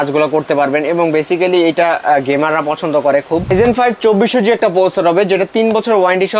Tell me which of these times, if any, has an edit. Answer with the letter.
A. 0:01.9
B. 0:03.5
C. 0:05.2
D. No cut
B